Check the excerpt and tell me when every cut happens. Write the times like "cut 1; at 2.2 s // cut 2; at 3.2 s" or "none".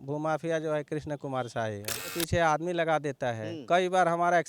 cut 1; at 2.1 s